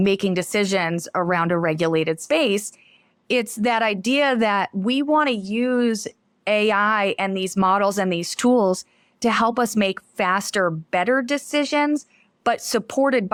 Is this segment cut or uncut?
uncut